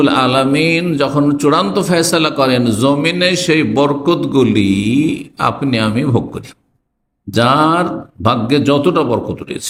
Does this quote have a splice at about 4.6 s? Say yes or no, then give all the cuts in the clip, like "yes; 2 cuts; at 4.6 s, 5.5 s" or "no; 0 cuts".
no; 0 cuts